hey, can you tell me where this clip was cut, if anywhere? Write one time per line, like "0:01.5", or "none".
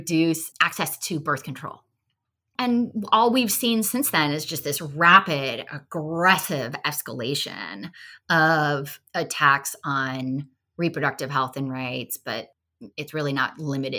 0:12.6

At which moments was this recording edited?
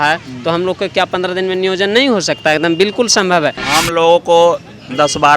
0:03.6

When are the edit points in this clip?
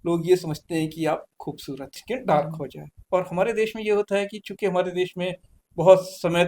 0:02.0

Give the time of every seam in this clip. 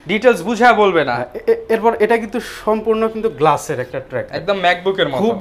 none

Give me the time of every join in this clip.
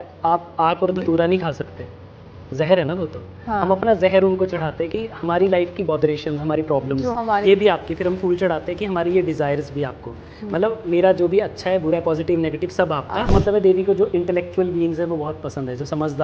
0:13.3

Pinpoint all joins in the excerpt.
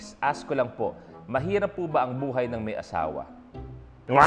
none

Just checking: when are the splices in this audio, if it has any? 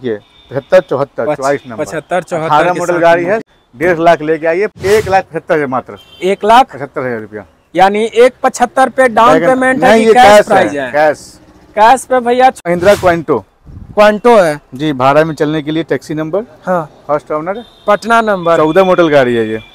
0:03.4
0:04.7
0:12.6

